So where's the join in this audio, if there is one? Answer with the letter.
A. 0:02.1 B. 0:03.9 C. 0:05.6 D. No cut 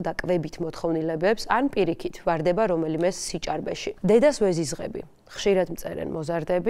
B